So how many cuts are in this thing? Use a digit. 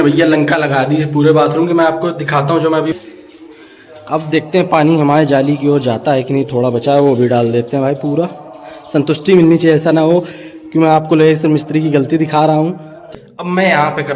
2